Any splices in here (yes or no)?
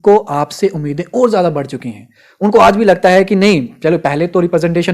no